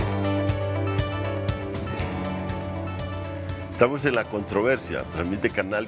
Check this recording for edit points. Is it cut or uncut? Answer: uncut